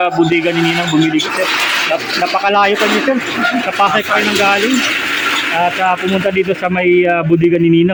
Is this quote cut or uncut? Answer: uncut